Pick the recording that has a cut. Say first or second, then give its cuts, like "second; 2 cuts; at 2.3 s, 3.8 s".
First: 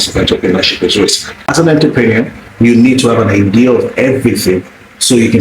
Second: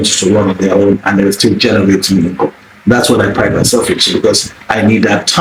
first; 1 cut; at 1.5 s